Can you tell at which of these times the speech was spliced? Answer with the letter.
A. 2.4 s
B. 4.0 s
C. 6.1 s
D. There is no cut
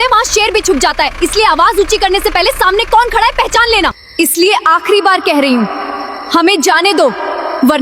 B